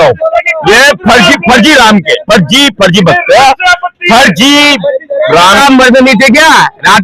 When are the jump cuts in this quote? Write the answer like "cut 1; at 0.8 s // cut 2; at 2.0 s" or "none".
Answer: cut 1; at 5.6 s